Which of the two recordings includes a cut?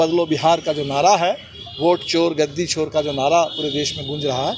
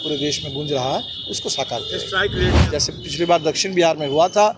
second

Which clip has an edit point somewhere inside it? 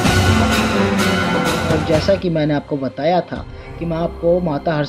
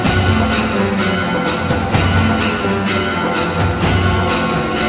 first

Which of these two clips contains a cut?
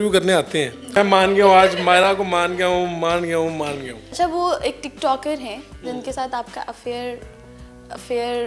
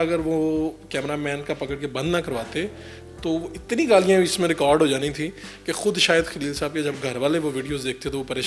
first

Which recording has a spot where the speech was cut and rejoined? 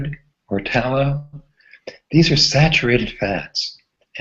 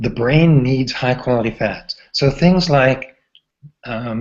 first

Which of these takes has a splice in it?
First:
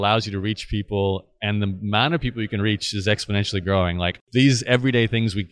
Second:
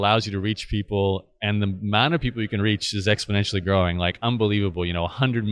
first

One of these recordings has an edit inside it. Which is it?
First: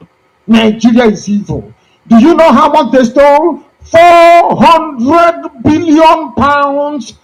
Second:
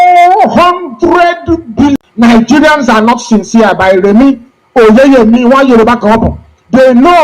second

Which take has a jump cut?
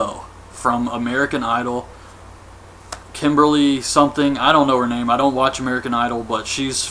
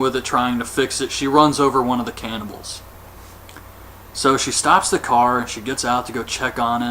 second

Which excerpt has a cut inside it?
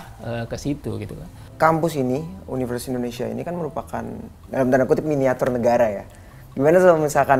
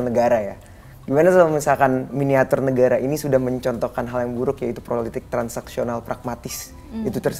first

